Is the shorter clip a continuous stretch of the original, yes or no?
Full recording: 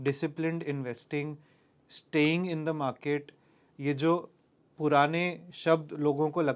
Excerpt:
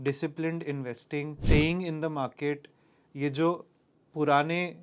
no